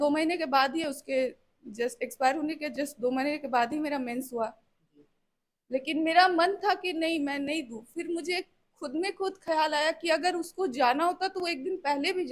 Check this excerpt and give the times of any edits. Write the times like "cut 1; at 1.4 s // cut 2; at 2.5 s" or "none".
none